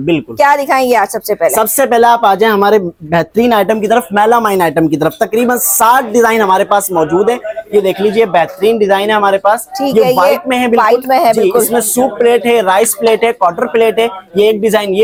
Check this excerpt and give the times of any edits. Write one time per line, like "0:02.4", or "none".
none

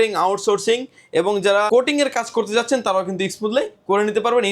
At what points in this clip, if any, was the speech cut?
0:01.7

